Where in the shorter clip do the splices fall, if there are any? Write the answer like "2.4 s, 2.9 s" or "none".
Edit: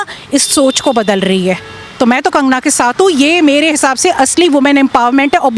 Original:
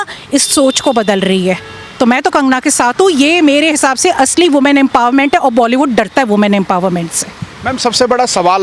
none